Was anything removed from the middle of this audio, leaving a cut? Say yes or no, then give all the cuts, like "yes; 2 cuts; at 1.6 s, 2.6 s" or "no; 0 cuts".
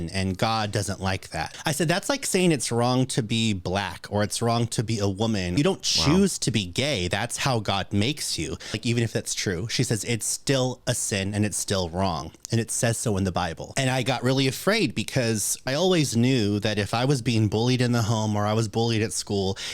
yes; 5 cuts; at 1.5 s, 5.5 s, 8.8 s, 13.6 s, 15.7 s